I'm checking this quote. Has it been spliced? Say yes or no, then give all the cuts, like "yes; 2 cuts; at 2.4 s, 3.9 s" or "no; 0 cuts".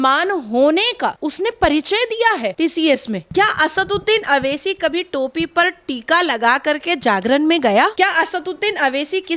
yes; 2 cuts; at 3.2 s, 7.9 s